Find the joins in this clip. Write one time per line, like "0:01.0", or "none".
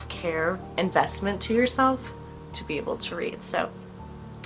none